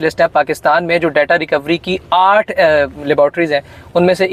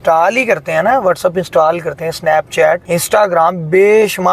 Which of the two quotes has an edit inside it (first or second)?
second